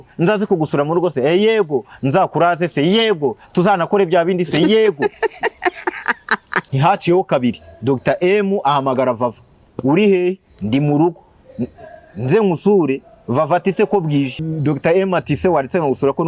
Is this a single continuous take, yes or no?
no